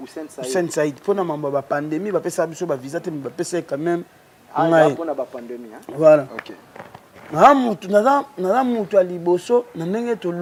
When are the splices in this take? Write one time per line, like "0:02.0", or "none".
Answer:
none